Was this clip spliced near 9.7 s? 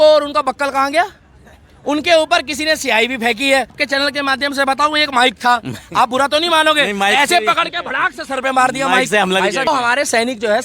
yes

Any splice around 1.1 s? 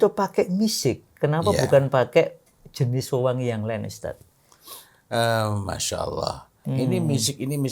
no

